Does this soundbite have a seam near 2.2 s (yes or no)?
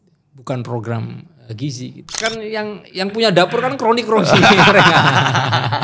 yes